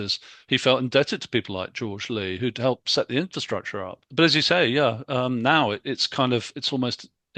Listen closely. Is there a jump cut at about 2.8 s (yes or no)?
no